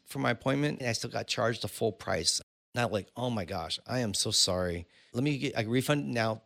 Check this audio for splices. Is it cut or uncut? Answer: cut